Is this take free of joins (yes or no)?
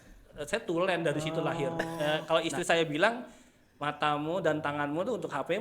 no